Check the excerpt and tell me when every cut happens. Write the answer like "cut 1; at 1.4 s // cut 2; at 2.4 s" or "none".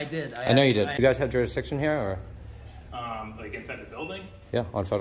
cut 1; at 1.0 s

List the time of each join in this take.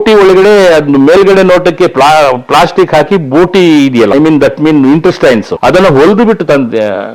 cut 1; at 4.1 s // cut 2; at 5.5 s

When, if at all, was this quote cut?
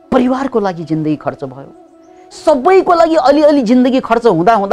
none

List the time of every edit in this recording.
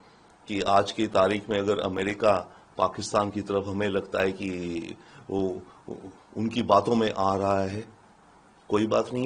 none

